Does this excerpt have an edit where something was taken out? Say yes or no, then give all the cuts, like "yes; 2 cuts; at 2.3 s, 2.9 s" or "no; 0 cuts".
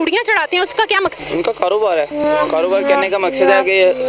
yes; 1 cut; at 1.2 s